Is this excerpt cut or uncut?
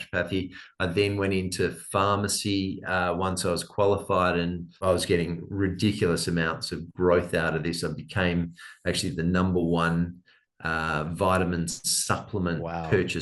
cut